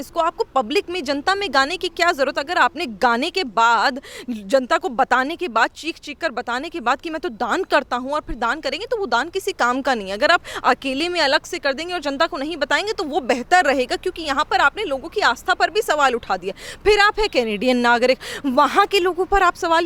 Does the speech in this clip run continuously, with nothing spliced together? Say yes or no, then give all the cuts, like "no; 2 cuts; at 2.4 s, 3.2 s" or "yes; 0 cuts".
yes; 0 cuts